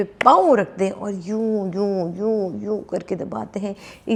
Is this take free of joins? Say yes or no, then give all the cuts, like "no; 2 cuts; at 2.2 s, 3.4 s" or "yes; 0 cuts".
yes; 0 cuts